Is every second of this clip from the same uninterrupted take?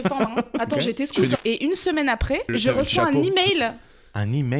no; 2 cuts; at 1.4 s, 2.5 s

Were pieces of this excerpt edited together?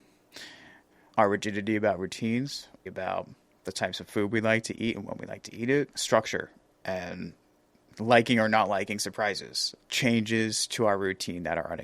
yes; 1 cut; at 2.8 s

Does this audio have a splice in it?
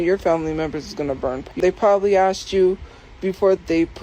yes; 1 cut; at 1.4 s

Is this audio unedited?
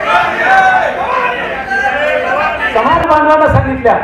no; 1 cut; at 2.7 s

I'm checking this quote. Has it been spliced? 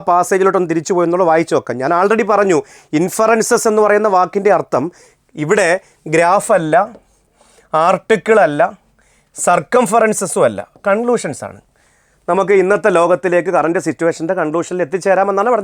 no; 0 cuts

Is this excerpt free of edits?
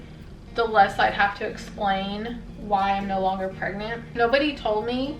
no; 1 cut; at 4.1 s

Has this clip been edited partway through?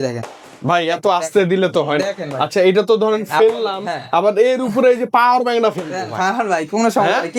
no; 0 cuts

